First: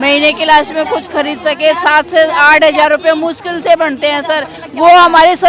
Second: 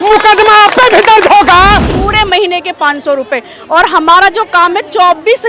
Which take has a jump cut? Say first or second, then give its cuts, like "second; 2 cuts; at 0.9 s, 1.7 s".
second; 1 cut; at 1.9 s